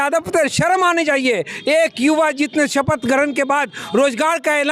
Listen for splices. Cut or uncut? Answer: uncut